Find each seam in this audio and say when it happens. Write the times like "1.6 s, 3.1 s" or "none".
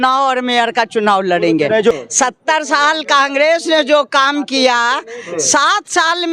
1.9 s